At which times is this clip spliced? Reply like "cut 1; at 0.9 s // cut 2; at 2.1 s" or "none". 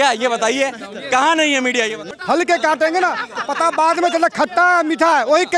cut 1; at 2.0 s